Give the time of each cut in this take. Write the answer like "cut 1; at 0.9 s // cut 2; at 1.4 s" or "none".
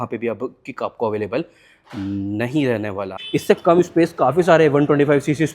cut 1; at 3.2 s